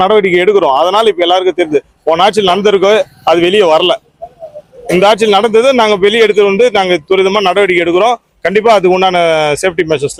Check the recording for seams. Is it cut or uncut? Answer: uncut